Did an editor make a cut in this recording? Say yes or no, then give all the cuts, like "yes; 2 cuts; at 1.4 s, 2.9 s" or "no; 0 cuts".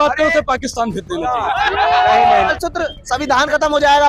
yes; 1 cut; at 2.5 s